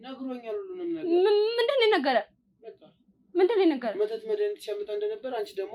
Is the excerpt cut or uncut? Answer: uncut